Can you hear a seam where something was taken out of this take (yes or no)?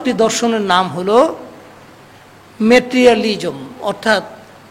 no